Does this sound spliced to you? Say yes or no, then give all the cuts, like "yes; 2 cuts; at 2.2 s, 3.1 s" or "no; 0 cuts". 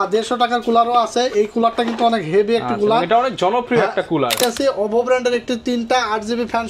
yes; 1 cut; at 4.4 s